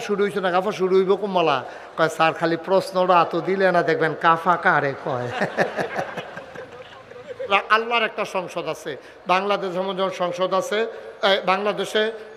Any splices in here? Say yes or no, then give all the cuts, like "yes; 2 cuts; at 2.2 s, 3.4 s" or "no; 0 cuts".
yes; 1 cut; at 7.5 s